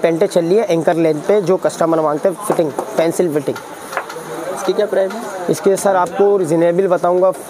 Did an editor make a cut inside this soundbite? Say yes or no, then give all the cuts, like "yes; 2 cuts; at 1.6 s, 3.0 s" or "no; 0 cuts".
no; 0 cuts